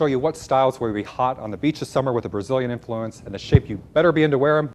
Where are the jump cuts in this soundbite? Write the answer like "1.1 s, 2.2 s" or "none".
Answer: none

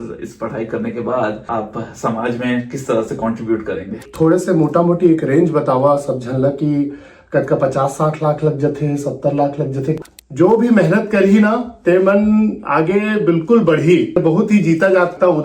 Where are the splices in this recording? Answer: 1.5 s, 4.0 s, 9.9 s

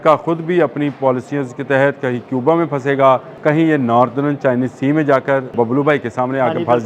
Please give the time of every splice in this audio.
3.3 s, 5.5 s

